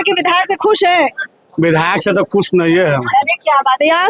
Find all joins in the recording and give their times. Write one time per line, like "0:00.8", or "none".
none